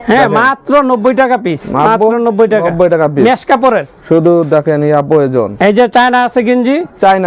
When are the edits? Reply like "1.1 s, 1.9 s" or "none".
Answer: none